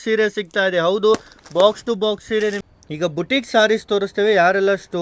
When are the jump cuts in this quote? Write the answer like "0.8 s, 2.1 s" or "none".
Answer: 2.7 s